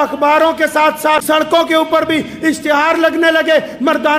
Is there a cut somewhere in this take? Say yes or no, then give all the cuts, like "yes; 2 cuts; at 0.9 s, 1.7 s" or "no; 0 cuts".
yes; 1 cut; at 1.2 s